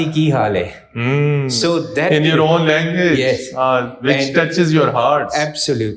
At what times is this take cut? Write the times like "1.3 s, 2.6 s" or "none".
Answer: none